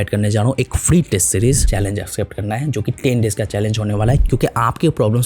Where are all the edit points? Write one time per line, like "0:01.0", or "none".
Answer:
0:01.6
0:04.2